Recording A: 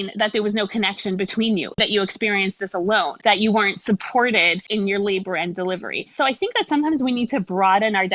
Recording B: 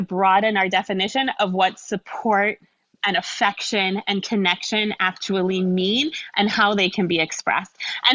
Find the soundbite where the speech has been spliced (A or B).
A